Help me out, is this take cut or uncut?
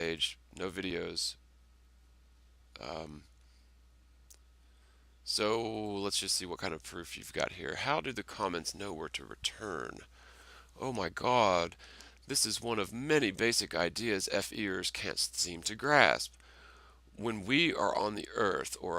cut